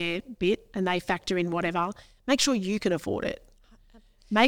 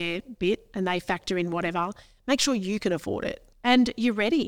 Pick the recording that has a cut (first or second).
second